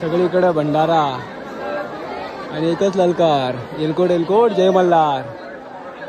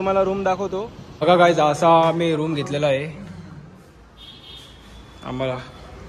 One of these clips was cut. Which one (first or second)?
second